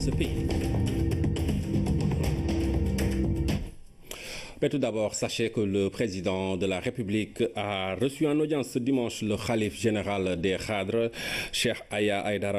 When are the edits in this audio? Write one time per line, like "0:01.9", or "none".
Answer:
none